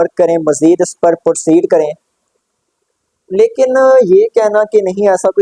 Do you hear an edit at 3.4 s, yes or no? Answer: no